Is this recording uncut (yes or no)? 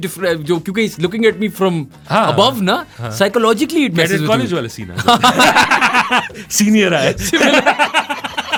yes